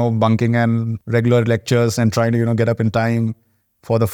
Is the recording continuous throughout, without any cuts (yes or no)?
no